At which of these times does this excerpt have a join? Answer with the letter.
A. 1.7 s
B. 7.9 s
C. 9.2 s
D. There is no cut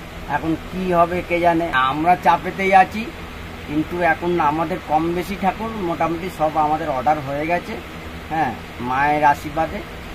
A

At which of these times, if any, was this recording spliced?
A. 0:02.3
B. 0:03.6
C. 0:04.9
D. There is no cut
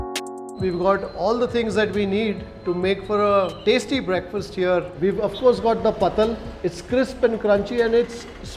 D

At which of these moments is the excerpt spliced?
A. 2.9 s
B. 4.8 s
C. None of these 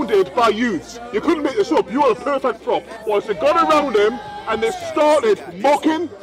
A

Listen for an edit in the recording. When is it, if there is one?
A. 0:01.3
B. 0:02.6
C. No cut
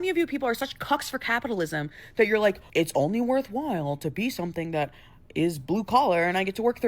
B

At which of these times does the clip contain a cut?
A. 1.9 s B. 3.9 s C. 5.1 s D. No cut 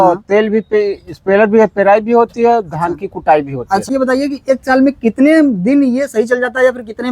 B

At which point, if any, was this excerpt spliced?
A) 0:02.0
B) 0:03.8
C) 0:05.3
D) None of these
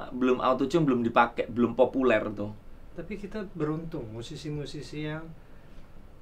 D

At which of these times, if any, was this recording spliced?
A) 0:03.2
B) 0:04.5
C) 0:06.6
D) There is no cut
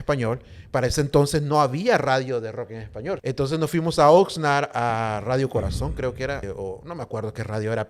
A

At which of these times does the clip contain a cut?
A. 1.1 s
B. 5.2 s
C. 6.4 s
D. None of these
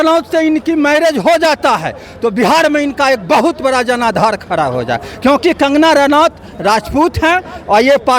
D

